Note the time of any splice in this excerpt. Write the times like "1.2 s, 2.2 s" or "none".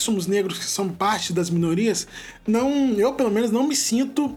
none